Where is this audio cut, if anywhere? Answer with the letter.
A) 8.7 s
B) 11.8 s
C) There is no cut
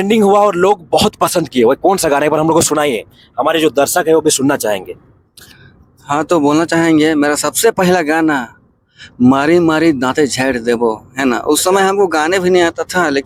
C